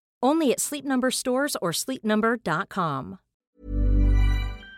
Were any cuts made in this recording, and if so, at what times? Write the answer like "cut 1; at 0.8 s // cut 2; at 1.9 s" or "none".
cut 1; at 3.3 s